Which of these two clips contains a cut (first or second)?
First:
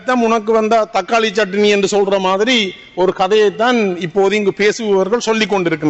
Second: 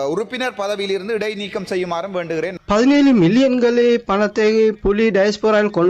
second